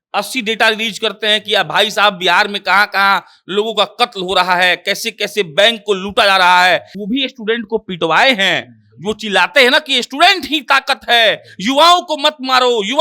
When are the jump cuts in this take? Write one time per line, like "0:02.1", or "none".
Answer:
0:06.9